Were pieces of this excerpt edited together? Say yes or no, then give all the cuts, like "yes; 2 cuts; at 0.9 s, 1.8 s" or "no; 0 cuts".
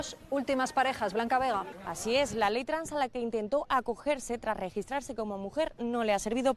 no; 0 cuts